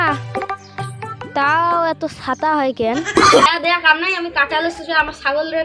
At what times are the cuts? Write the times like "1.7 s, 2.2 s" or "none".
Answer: 3.5 s